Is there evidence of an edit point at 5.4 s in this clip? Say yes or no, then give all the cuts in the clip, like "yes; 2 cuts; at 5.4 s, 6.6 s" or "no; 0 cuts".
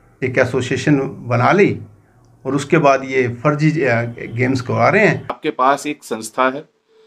yes; 1 cut; at 5.4 s